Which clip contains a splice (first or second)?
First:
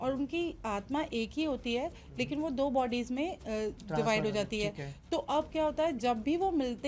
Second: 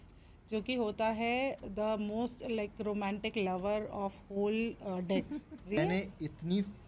second